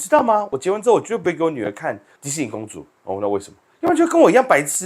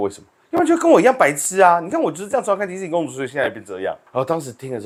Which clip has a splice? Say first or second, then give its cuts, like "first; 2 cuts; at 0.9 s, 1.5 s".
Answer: first; 1 cut; at 2.1 s